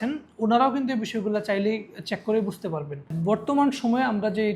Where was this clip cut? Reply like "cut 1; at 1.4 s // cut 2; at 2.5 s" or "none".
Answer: none